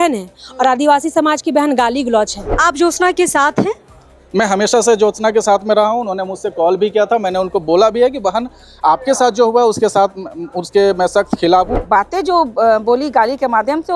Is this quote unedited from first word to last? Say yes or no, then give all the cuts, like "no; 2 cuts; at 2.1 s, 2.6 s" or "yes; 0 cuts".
no; 2 cuts; at 2.4 s, 11.7 s